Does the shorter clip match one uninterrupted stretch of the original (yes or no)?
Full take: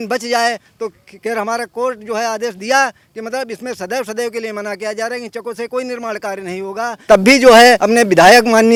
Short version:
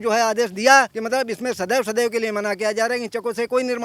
no